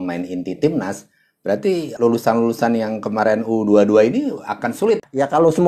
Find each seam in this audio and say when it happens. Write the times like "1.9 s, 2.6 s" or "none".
1.9 s, 4.6 s